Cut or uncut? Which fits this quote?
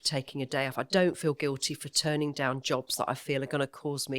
uncut